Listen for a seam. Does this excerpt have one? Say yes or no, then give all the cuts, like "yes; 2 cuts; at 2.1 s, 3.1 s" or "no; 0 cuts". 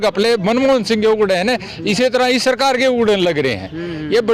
no; 0 cuts